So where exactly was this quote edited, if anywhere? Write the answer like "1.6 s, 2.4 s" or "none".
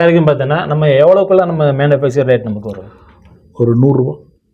none

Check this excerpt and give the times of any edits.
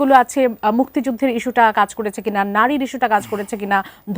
none

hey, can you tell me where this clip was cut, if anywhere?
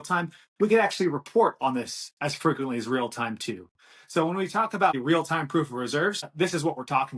5.0 s, 6.2 s

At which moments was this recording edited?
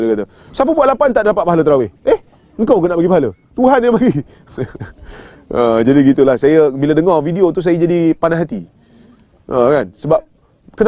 none

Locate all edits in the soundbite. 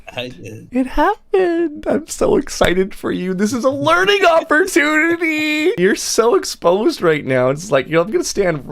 5.8 s

